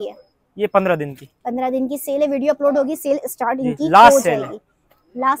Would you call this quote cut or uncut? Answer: uncut